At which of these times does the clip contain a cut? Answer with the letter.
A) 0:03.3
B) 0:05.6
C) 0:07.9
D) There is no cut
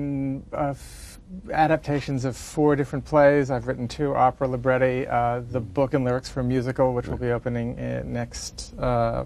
B